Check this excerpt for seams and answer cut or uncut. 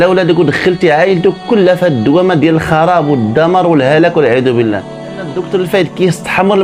cut